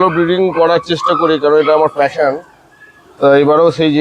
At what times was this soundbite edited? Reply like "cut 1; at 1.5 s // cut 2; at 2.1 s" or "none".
none